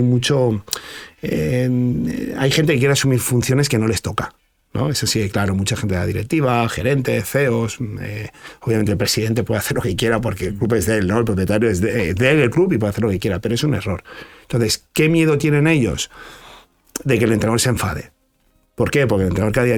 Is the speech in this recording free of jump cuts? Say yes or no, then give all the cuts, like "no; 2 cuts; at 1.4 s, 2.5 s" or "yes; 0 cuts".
yes; 0 cuts